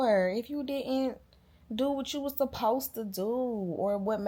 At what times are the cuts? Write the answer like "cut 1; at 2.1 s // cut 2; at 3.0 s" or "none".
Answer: none